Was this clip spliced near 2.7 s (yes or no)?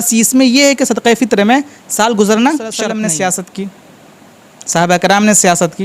yes